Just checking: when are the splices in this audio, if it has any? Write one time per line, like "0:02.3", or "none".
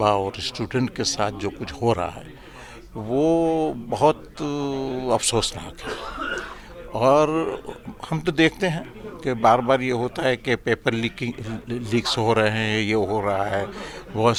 none